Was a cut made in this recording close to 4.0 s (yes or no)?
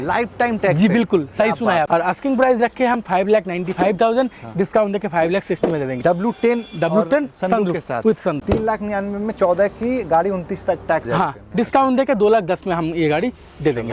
no